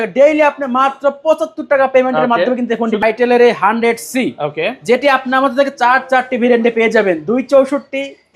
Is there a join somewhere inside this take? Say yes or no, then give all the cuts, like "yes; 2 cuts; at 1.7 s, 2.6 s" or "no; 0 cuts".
yes; 1 cut; at 3.0 s